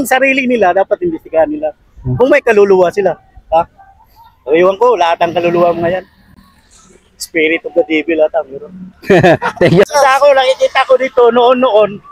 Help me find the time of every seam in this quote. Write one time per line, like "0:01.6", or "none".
0:09.9